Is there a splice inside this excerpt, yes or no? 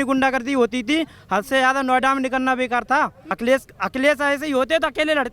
yes